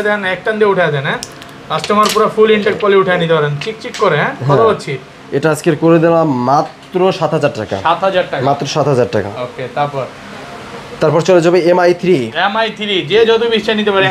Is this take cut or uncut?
uncut